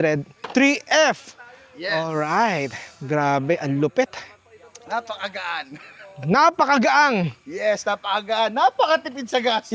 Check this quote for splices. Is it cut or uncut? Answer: uncut